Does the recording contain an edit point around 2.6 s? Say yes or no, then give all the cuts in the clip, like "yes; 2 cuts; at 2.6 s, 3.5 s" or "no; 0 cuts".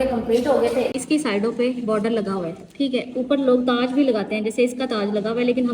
no; 1 cut; at 0.9 s